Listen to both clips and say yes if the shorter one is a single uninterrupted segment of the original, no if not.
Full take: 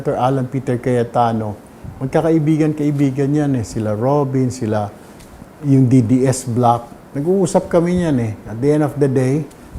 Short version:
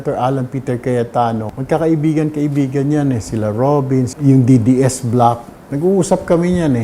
no